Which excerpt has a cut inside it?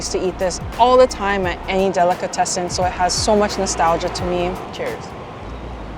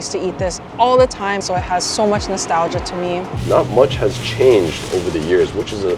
second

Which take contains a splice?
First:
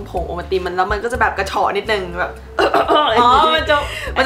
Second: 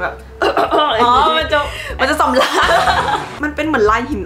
second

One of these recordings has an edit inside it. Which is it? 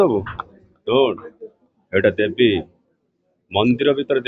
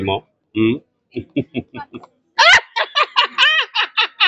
second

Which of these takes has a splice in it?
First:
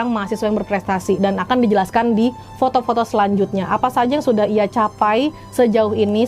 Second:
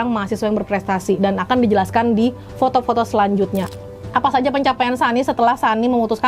second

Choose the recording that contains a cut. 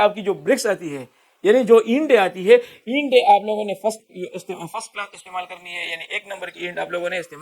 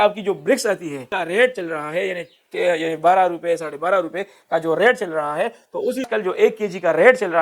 second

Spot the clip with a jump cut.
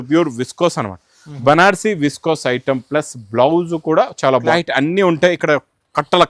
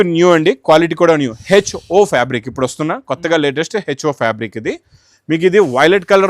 first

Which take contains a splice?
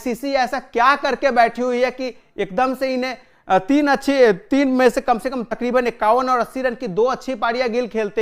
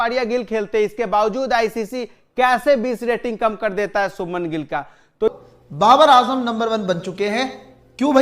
second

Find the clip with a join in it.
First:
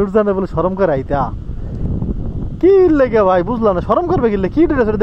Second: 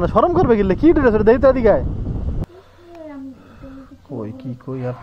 second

